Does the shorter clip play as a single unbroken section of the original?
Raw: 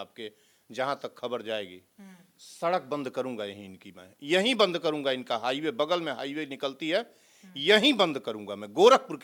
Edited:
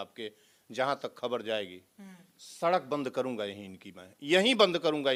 yes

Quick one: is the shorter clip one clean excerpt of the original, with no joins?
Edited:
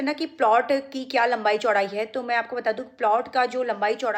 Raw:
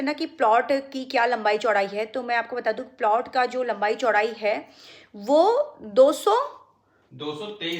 yes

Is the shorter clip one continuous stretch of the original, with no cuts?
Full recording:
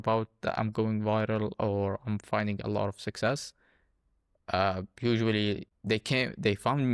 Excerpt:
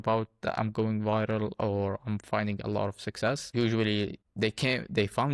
no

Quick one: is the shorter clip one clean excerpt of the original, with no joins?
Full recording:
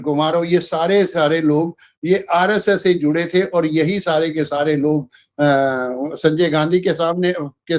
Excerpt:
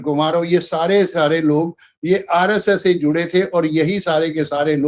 yes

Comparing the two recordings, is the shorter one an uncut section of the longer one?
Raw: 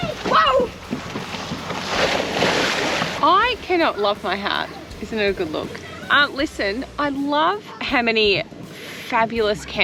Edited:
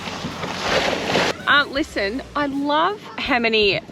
no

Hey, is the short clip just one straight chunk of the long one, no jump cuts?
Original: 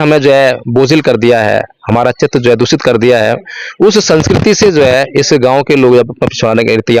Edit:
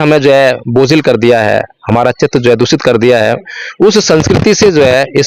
yes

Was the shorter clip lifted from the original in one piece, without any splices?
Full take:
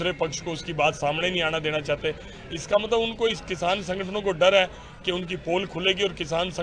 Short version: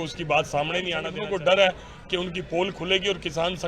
no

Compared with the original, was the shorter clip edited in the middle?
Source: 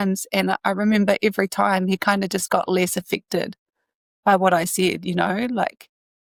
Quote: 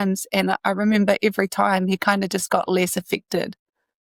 no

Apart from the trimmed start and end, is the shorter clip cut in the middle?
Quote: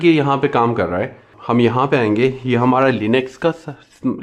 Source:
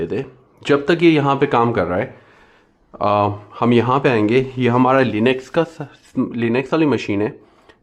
yes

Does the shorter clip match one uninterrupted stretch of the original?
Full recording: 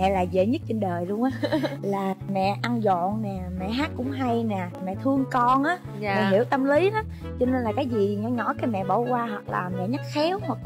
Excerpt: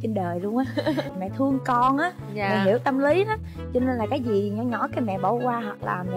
no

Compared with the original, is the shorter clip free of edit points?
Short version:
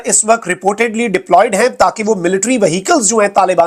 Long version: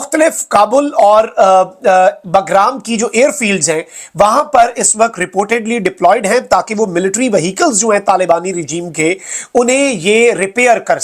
yes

